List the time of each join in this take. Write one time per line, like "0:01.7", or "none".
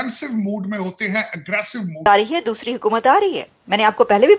0:02.1